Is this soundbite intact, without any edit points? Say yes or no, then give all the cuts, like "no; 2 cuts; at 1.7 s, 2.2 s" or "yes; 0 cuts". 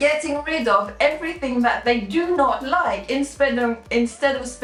yes; 0 cuts